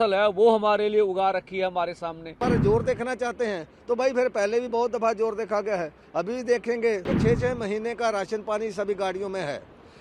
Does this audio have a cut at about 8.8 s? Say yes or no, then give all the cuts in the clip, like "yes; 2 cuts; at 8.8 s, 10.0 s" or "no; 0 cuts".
no; 2 cuts; at 2.4 s, 7.1 s